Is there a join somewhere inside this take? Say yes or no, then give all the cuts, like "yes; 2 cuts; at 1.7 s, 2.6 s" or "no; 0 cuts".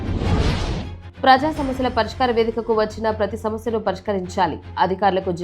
yes; 1 cut; at 1.0 s